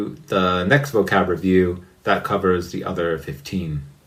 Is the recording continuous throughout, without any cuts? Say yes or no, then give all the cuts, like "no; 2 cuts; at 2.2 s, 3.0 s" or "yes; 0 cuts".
yes; 0 cuts